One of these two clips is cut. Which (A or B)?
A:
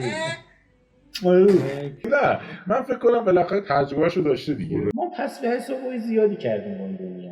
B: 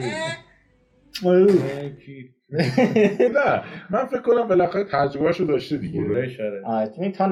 A